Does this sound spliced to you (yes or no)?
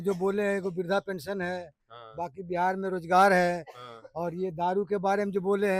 no